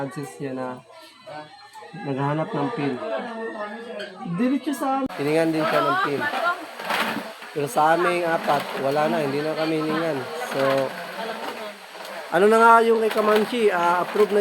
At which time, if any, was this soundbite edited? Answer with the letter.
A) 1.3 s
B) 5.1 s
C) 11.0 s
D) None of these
B